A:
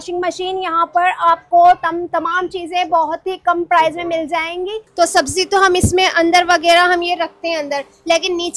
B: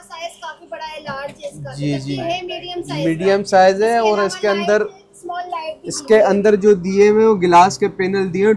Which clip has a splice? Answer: A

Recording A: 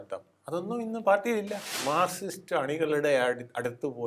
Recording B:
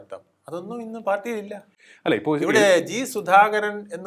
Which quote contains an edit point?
A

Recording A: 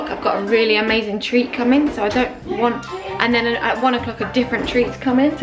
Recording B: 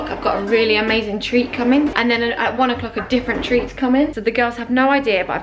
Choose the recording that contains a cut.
B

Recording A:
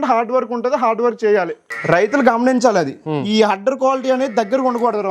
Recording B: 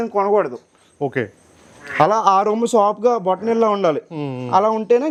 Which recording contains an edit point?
A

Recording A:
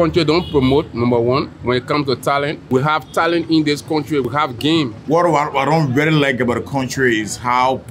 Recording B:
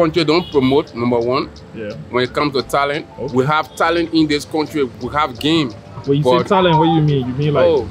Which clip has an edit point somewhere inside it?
A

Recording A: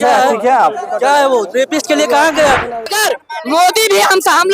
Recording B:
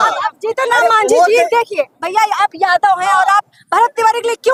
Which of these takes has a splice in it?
A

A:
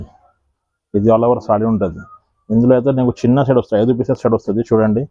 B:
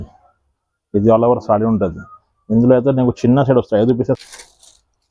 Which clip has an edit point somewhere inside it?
B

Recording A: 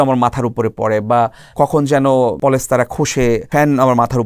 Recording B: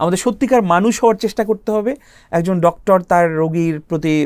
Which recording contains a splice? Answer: A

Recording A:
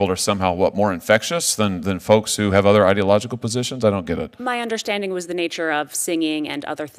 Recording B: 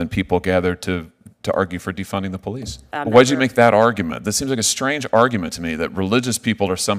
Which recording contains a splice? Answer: B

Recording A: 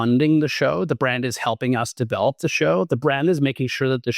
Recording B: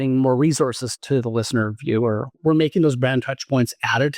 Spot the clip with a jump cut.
B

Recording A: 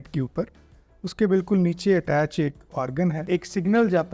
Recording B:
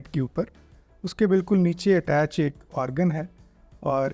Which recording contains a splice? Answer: A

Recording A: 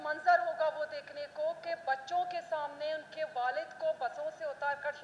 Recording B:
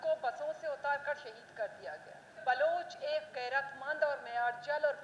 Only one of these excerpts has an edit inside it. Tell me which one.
B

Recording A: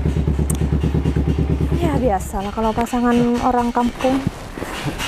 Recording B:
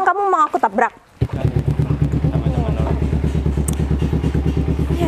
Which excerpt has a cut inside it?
B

